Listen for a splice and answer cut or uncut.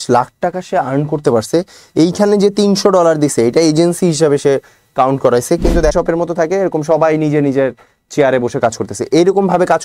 cut